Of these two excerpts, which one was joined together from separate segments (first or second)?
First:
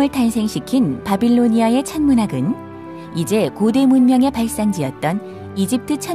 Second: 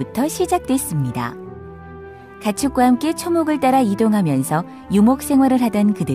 second